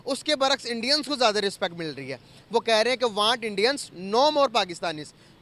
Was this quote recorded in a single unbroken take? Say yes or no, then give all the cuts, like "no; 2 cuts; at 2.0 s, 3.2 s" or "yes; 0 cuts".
yes; 0 cuts